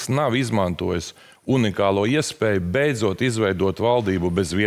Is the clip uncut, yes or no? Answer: yes